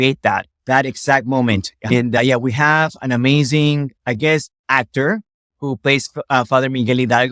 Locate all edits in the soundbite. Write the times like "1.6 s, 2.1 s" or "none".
1.9 s